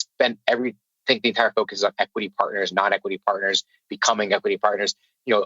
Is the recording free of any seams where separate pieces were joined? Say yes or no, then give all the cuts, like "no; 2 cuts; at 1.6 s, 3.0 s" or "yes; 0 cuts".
yes; 0 cuts